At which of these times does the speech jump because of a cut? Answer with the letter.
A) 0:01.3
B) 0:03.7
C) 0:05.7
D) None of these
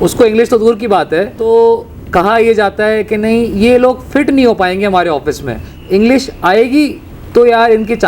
C